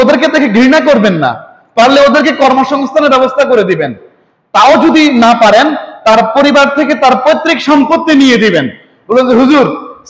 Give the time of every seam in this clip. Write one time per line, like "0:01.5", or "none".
none